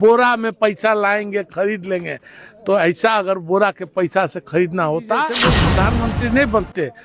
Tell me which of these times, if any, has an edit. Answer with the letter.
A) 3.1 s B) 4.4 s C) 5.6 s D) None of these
C